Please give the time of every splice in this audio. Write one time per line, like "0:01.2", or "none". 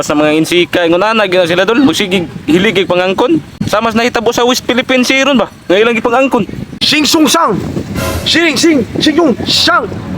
0:03.6
0:06.7